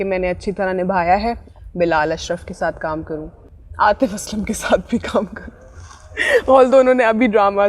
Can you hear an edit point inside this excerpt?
yes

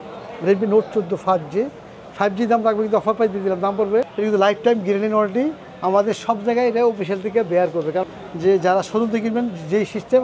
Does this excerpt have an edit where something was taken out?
yes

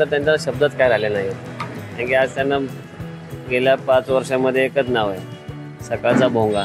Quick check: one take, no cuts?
yes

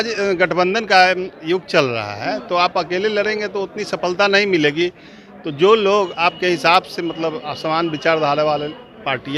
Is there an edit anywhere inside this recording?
no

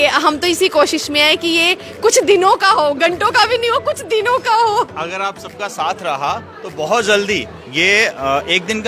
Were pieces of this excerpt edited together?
no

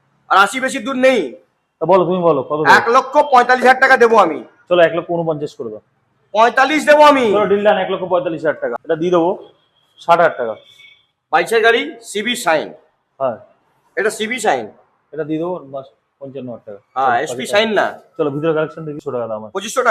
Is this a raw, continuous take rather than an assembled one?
no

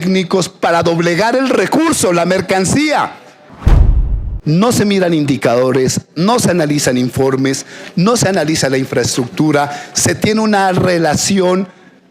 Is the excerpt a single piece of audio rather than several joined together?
no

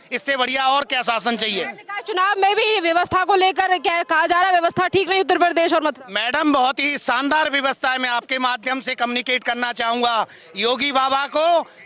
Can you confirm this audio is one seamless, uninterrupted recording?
yes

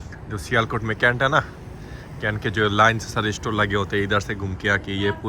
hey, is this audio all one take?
yes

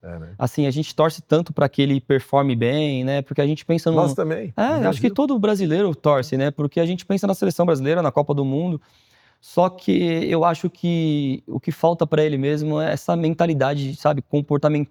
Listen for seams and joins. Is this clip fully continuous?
yes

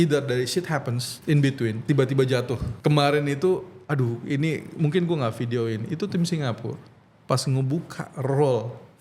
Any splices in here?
yes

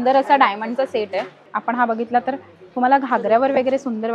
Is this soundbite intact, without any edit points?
no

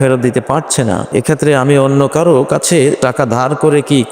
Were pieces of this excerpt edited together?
yes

